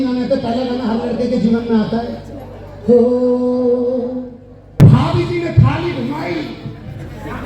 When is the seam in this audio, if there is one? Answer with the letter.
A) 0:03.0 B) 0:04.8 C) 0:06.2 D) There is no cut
B